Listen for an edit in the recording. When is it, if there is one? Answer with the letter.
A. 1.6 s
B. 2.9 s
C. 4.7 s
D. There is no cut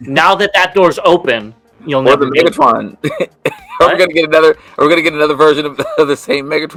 D